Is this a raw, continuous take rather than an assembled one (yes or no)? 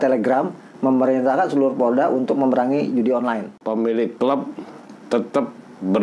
no